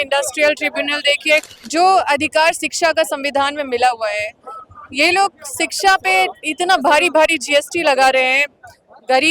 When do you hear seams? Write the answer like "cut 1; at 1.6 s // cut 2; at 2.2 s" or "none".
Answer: cut 1; at 1.4 s